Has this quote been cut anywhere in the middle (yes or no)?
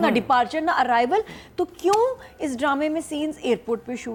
no